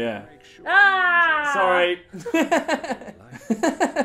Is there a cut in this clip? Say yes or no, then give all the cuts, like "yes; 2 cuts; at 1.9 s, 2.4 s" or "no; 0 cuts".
no; 0 cuts